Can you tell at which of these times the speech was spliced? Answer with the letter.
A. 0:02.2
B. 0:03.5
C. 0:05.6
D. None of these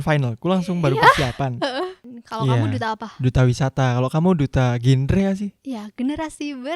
A